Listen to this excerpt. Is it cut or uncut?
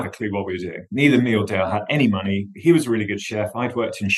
uncut